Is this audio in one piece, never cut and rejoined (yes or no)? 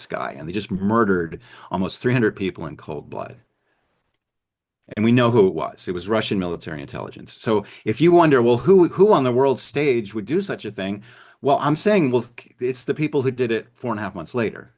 yes